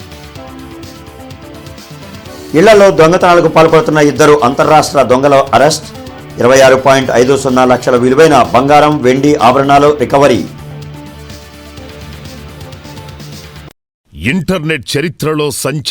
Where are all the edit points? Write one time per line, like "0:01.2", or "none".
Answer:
0:14.1

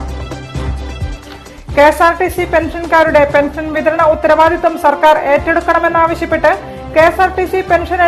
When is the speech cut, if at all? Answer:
none

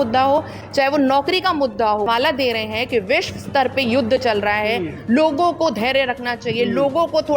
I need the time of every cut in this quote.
0:02.1

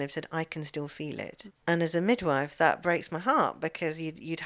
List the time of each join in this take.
0:01.4

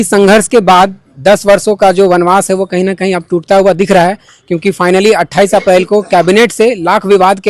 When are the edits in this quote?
none

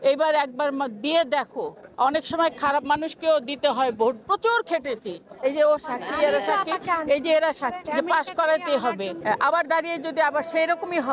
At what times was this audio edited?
0:04.2
0:07.8
0:09.1

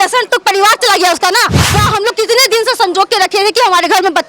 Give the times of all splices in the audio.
0:01.8

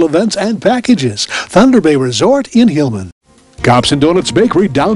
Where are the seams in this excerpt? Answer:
0:03.0

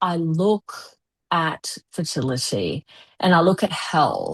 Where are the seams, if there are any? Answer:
none

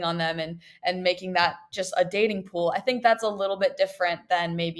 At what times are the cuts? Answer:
none

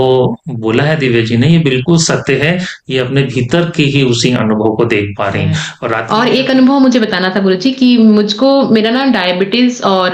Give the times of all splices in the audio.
0:06.0

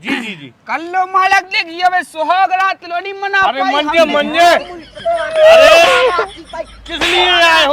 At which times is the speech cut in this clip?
none

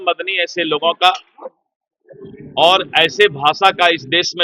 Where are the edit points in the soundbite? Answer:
none

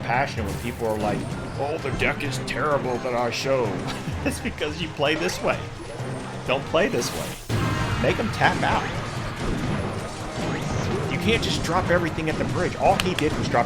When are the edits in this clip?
none

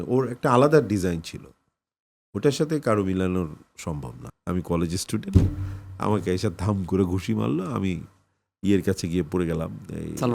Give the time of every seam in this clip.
0:04.2

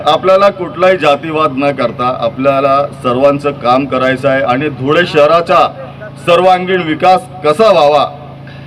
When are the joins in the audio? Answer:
none

